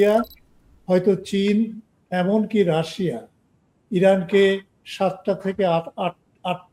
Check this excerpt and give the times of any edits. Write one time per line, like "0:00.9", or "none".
none